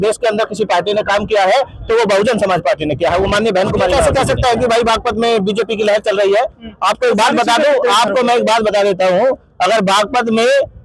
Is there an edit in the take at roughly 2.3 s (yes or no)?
no